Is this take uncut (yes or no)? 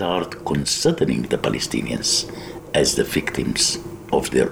yes